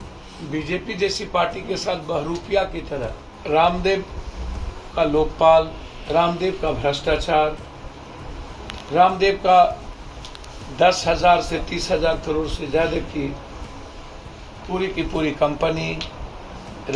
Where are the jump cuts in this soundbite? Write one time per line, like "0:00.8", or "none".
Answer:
0:03.3